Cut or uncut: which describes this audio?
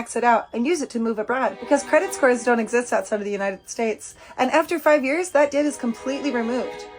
uncut